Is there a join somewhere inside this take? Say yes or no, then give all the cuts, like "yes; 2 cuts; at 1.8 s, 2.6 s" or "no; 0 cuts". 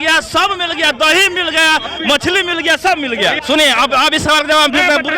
yes; 1 cut; at 3.4 s